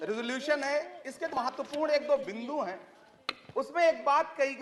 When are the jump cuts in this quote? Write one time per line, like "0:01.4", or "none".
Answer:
0:01.4